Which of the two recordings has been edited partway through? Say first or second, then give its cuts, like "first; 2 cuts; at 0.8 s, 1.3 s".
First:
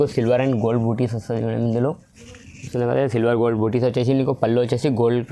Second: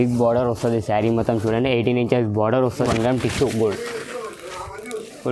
second; 1 cut; at 2.8 s